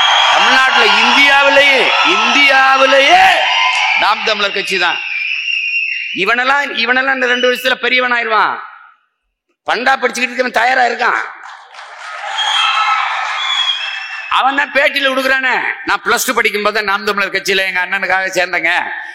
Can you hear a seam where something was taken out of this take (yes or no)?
no